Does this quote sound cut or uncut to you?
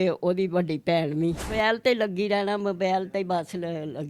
cut